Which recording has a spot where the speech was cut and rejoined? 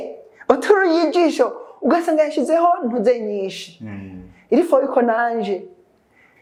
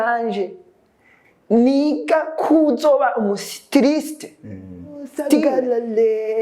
second; 1 cut; at 5.4 s

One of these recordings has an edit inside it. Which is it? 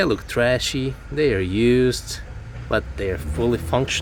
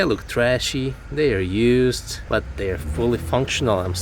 second; 1 cut; at 2.1 s

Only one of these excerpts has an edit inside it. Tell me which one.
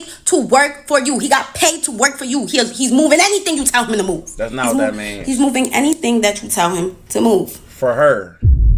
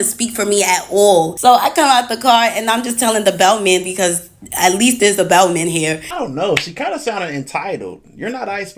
second; 2 cuts; at 1.3 s, 6.1 s

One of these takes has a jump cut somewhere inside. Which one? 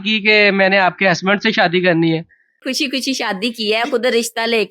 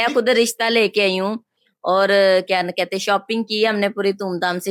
first; 1 cut; at 2.6 s

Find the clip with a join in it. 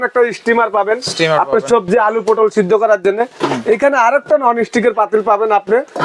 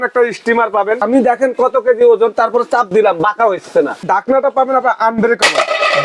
second; 2 cuts; at 1.0 s, 4.0 s

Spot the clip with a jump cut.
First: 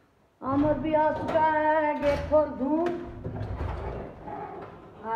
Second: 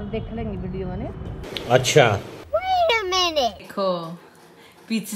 second; 1 cut; at 1.3 s

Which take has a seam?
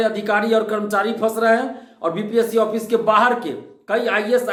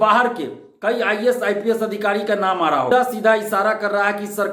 second; 1 cut; at 2.9 s

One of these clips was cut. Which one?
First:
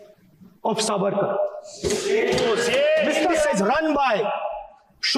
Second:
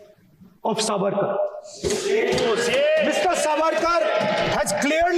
first; 1 cut; at 3.3 s

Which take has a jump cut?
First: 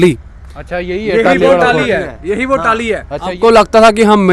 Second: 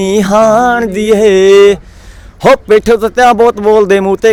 first; 1 cut; at 3.4 s

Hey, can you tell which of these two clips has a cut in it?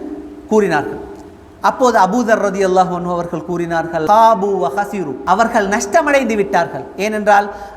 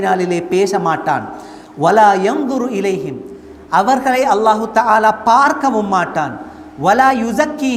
first; 2 cuts; at 4.0 s, 5.1 s

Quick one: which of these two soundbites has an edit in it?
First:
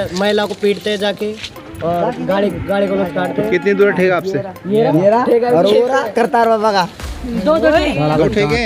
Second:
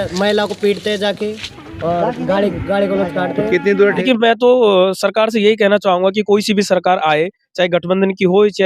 second; 1 cut; at 4.0 s

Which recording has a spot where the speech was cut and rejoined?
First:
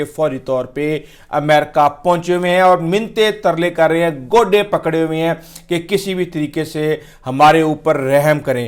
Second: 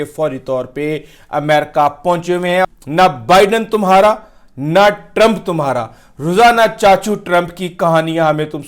second; 1 cut; at 2.6 s

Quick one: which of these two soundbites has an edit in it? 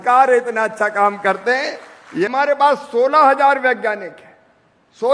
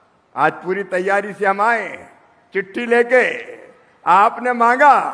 first; 1 cut; at 2.3 s

